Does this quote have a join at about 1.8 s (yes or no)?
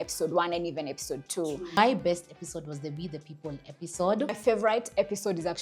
yes